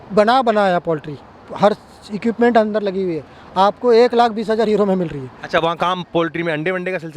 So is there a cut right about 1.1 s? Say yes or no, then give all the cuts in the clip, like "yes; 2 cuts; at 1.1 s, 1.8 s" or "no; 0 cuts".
no; 0 cuts